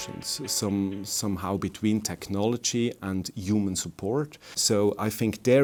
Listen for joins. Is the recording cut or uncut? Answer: uncut